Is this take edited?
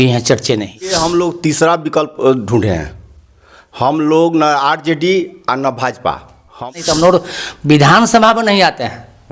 yes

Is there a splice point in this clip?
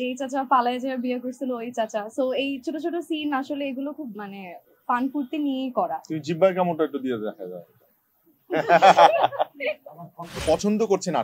yes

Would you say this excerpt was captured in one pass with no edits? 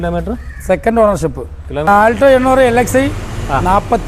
no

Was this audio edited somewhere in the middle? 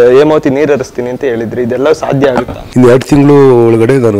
yes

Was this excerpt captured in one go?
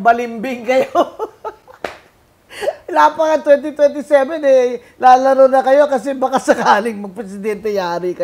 yes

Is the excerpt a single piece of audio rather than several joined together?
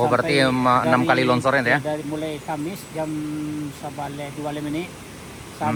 yes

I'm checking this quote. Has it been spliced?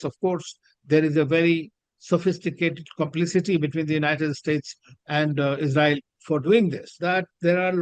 yes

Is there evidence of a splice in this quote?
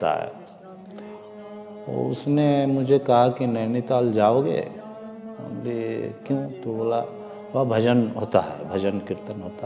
no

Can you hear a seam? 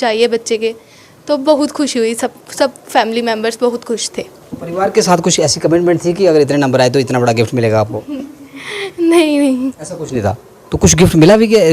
no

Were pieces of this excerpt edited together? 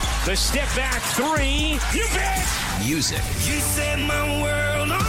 no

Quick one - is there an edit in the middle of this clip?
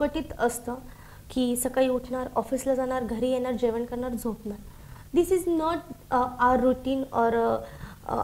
no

